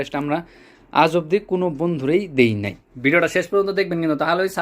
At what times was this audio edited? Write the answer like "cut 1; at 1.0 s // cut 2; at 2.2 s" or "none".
cut 1; at 2.9 s